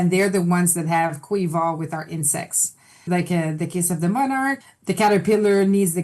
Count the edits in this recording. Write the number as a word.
two